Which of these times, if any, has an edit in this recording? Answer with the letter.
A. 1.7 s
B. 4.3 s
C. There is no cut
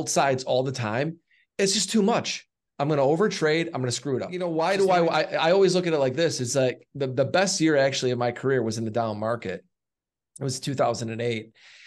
B